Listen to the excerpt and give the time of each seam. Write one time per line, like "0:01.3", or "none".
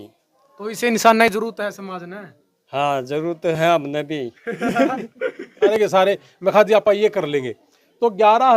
0:05.7

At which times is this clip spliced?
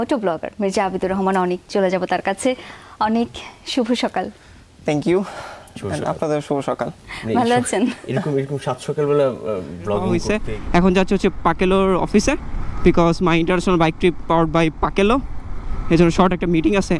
0:10.2

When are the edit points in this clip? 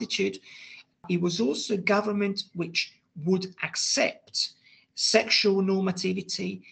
0:01.0

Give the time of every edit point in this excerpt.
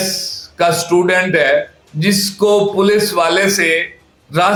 none

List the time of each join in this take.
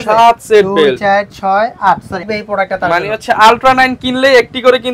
0:02.3

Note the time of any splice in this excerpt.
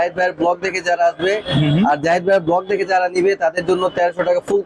none

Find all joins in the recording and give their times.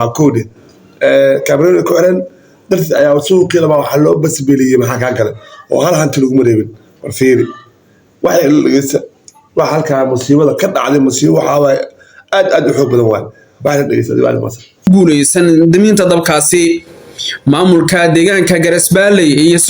0:14.9

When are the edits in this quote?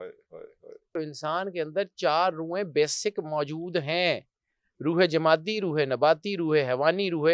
0:01.0

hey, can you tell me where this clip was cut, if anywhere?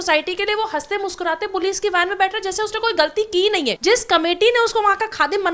0:03.7

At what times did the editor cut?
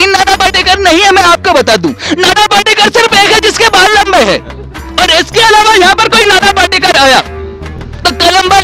none

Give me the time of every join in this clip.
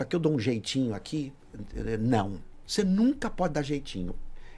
none

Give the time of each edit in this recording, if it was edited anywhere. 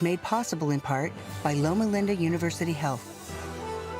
0:03.0

